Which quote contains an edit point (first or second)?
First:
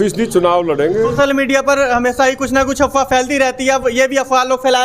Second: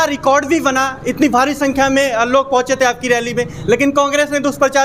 first